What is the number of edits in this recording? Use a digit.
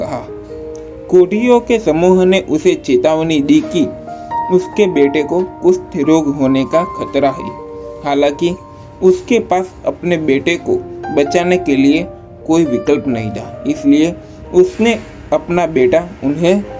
0